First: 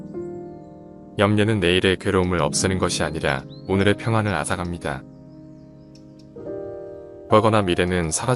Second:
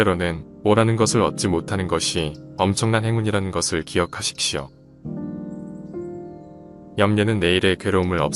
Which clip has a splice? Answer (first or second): first